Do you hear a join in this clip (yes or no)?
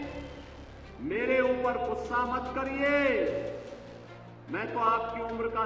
no